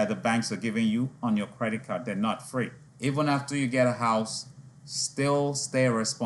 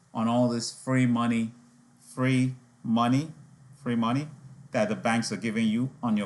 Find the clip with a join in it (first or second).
first